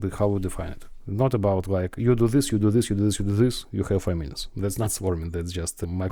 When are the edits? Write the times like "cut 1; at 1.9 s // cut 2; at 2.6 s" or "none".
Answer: none